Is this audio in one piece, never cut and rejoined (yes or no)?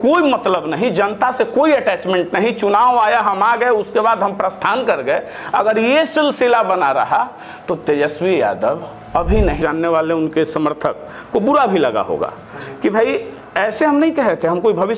no